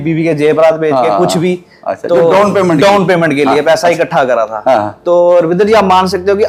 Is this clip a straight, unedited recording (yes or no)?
yes